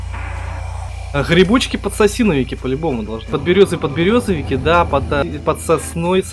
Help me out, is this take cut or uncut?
cut